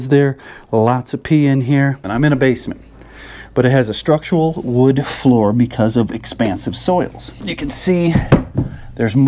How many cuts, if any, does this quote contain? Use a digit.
2